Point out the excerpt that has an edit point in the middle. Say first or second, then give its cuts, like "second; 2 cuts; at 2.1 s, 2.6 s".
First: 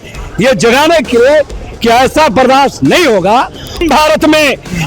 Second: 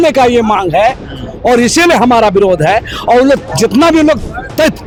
first; 1 cut; at 3.8 s